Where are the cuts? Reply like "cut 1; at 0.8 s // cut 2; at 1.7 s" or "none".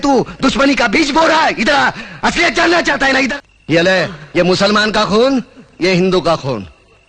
cut 1; at 3.3 s